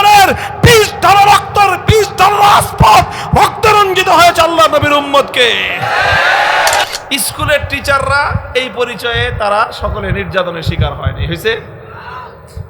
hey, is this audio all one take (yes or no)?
no